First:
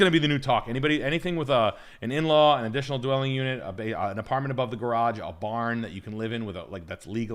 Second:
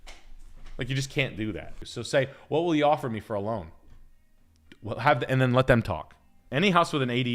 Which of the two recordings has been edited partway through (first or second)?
second